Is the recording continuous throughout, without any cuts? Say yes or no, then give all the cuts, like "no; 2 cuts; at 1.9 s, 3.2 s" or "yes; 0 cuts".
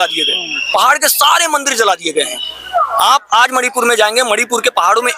yes; 0 cuts